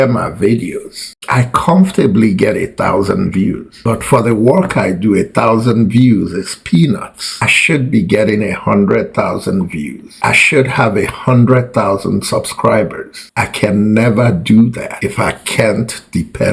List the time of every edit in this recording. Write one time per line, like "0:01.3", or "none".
none